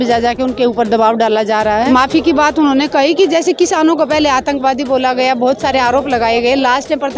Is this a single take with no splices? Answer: no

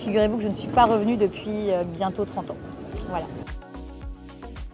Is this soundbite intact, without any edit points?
no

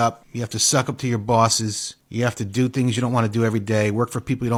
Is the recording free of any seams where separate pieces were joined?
yes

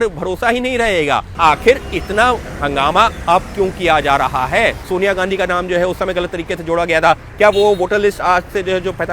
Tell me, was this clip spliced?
yes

